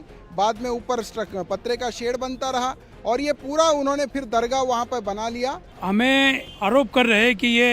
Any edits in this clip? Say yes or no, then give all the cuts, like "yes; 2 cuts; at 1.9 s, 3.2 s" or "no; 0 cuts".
yes; 2 cuts; at 5.7 s, 6.5 s